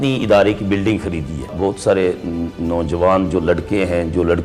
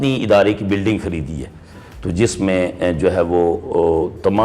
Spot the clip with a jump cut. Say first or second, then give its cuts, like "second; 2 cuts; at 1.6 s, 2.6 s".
first; 1 cut; at 1.5 s